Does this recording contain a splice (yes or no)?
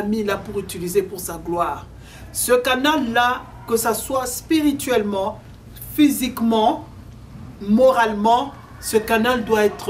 no